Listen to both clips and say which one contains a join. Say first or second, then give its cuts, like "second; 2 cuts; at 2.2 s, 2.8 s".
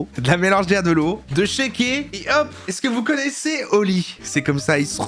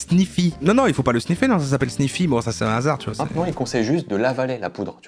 first; 1 cut; at 4.2 s